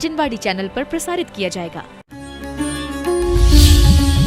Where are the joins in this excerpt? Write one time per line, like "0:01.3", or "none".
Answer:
0:02.0